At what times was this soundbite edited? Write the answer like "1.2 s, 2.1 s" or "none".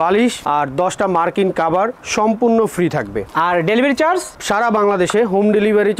none